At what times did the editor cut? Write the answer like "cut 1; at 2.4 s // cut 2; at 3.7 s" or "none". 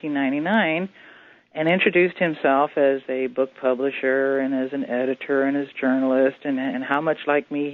cut 1; at 3.3 s